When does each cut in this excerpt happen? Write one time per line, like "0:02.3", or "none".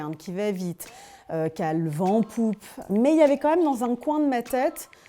0:02.7